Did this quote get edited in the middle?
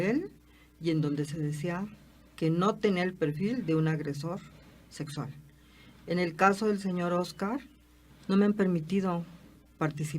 yes; 1 cut; at 1.2 s

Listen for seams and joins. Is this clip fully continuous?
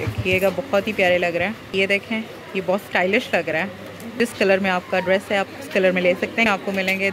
no; 3 cuts; at 1.7 s, 4.1 s, 6.5 s

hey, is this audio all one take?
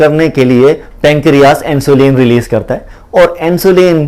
yes; 0 cuts

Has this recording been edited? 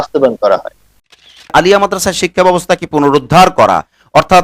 yes; 1 cut; at 1.2 s

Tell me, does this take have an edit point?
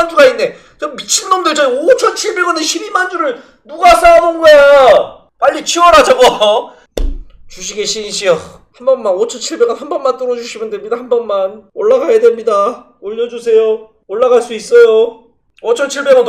yes; 3 cuts; at 6.8 s, 8.7 s, 11.6 s

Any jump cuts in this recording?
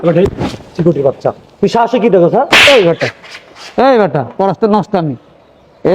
yes; 1 cut; at 2.5 s

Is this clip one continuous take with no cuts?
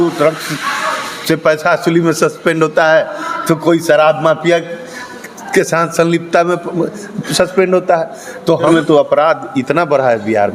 no; 1 cut; at 8.7 s

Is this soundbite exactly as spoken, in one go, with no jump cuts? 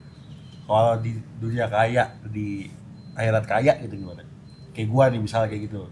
yes; 0 cuts

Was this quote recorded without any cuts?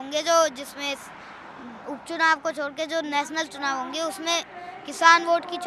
yes; 0 cuts

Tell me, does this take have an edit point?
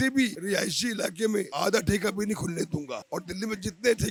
no; 0 cuts

